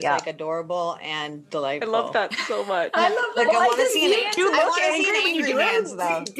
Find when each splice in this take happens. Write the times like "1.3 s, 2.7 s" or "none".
none